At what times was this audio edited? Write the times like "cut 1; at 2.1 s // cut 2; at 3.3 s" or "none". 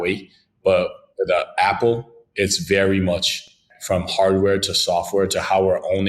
cut 1; at 3.7 s